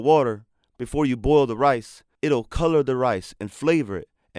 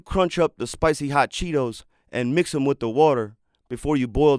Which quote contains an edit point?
first; 1 cut; at 2.4 s

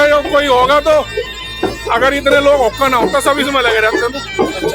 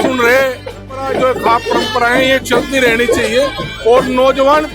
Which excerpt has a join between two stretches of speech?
second; 1 cut; at 1.0 s

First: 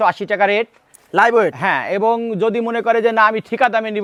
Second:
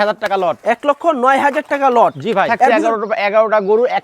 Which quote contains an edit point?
second; 1 cut; at 2.8 s

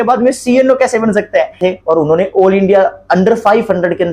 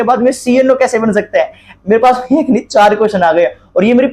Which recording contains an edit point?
first; 1 cut; at 1.6 s

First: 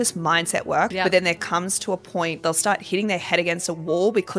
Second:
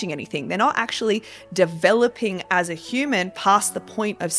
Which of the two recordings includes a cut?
first; 2 cuts; at 0.9 s, 2.4 s

